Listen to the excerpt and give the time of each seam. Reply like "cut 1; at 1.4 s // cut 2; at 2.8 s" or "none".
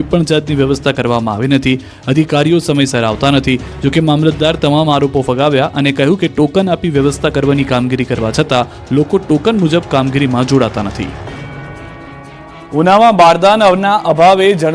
cut 1; at 7.8 s